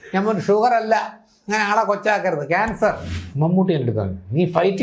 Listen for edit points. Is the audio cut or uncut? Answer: cut